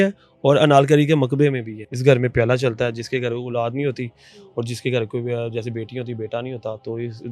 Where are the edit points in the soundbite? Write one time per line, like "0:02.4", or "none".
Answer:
0:01.7